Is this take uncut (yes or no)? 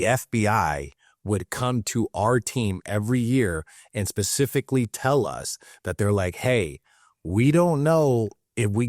yes